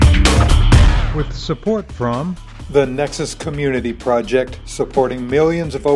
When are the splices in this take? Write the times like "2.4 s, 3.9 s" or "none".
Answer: 1.0 s